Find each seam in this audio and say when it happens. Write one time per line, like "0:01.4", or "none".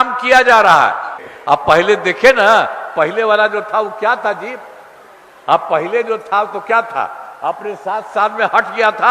0:01.1